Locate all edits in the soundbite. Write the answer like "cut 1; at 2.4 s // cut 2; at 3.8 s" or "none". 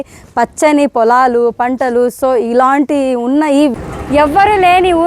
cut 1; at 3.8 s

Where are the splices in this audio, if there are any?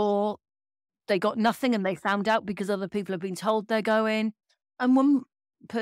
cut 1; at 4.7 s

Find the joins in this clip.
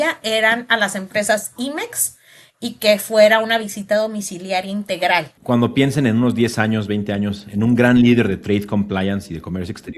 cut 1; at 5.3 s

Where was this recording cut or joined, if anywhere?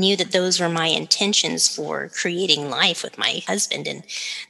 cut 1; at 3.4 s

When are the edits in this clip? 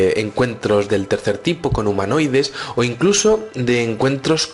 cut 1; at 1.4 s

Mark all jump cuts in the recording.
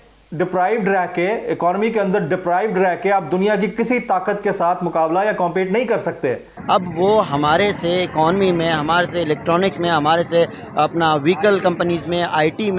cut 1; at 6.5 s

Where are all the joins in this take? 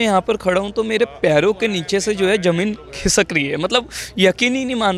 none

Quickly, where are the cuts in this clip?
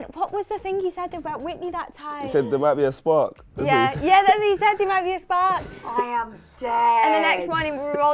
cut 1; at 2.3 s

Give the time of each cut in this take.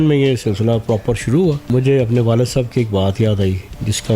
cut 1; at 1.7 s

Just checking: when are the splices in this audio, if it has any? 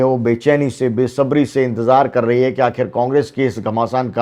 none

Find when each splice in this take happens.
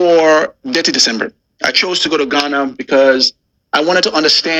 none

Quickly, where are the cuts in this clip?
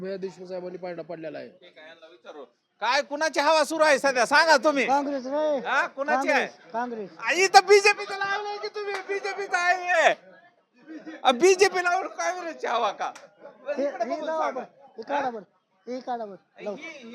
none

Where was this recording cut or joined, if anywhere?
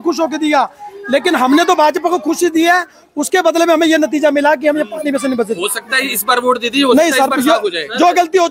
none

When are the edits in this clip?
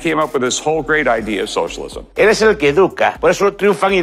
cut 1; at 2.0 s // cut 2; at 3.2 s

